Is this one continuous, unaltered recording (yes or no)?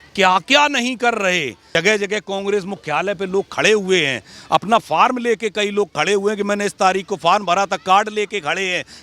no